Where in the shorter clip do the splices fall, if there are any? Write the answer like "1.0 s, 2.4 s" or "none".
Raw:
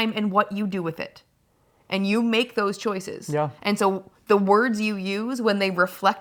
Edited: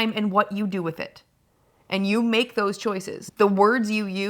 3.2 s